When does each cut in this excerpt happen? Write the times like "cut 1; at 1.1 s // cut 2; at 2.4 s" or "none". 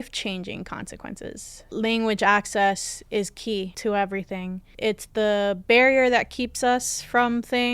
cut 1; at 1.6 s // cut 2; at 3.7 s // cut 3; at 4.7 s